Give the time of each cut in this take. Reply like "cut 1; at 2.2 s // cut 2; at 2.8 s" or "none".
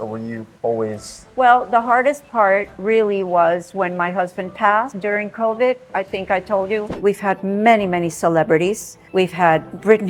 cut 1; at 6.9 s // cut 2; at 9.0 s